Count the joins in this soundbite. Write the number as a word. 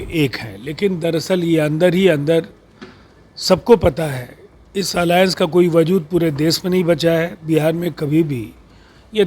zero